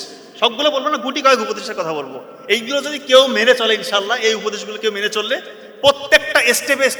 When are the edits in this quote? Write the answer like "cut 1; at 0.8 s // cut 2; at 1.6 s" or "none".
none